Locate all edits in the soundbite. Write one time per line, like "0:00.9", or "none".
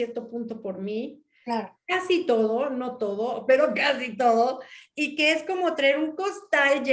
none